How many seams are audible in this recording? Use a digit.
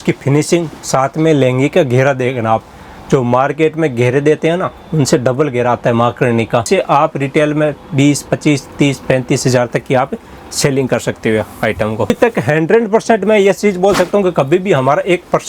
2